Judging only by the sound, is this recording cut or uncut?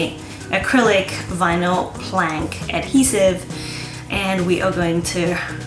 uncut